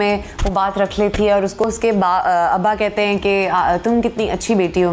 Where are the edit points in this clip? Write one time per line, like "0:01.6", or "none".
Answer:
0:01.6